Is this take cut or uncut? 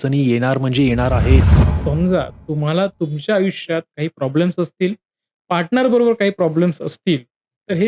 cut